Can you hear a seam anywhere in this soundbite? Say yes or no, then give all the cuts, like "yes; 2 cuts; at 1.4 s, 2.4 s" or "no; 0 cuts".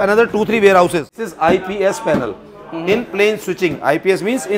yes; 1 cut; at 1.3 s